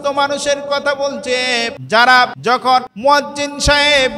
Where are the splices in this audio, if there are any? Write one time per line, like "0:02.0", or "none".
0:01.8
0:02.6